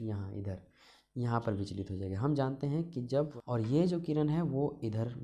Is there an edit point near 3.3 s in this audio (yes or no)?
yes